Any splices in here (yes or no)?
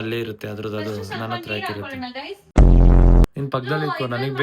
yes